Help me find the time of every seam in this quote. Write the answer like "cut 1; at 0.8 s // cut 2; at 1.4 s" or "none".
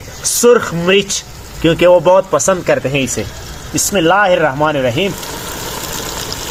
none